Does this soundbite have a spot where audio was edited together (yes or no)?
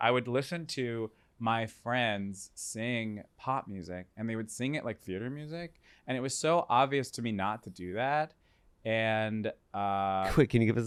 no